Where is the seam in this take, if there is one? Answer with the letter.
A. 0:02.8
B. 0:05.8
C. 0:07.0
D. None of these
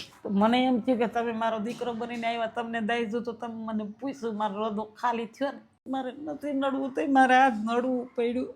B